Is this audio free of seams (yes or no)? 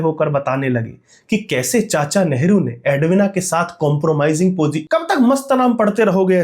no